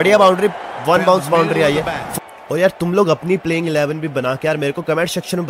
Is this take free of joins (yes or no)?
no